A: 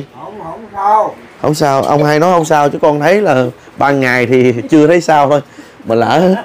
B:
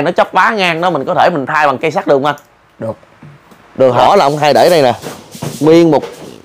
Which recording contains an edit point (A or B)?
B